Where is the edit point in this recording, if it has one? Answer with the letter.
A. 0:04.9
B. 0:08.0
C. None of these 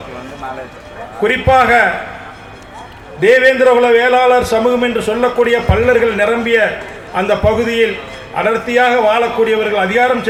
C